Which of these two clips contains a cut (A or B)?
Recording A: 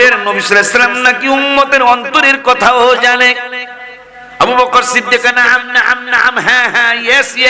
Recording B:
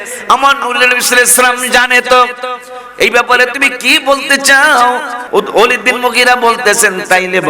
B